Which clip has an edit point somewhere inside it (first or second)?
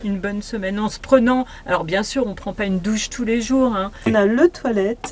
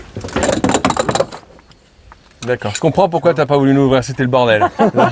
first